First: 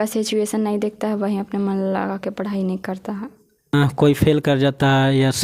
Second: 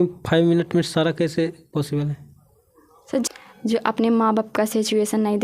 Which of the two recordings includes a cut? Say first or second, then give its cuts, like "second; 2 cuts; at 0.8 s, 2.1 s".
second; 1 cut; at 3.2 s